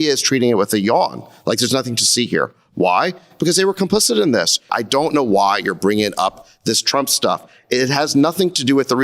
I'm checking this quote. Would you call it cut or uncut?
cut